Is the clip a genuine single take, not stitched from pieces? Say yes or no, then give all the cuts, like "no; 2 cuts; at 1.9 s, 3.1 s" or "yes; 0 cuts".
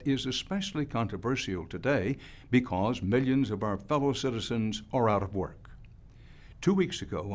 no; 1 cut; at 2.3 s